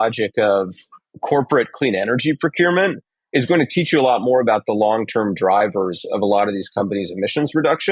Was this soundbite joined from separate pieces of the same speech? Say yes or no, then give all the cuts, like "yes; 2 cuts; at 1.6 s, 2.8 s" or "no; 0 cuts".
no; 0 cuts